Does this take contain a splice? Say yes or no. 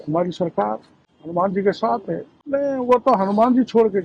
yes